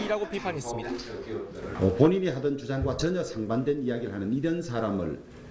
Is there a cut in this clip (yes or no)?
yes